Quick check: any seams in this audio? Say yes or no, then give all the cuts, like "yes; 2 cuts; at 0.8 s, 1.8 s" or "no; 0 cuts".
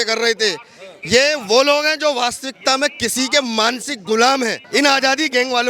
yes; 1 cut; at 4.6 s